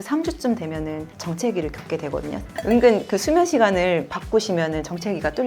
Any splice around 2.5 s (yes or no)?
yes